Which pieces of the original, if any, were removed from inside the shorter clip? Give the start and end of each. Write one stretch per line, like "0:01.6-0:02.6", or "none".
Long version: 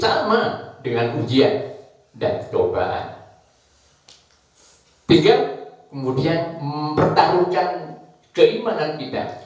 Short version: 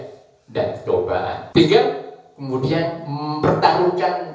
0:03.1-0:05.0